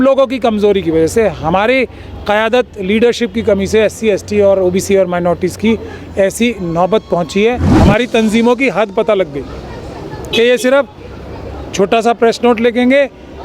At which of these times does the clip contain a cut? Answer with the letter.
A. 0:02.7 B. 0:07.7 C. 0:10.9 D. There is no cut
B